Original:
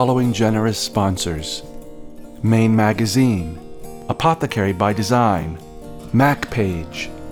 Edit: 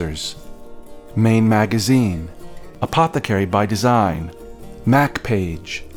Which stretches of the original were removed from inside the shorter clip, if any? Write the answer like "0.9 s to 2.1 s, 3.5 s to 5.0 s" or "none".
none